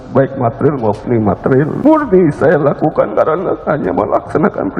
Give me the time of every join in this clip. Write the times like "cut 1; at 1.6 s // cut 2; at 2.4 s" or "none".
cut 1; at 1.8 s // cut 2; at 3.1 s